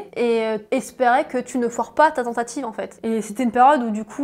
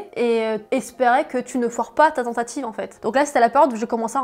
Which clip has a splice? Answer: second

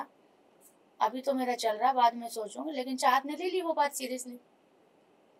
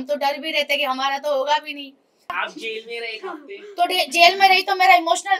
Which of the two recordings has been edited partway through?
second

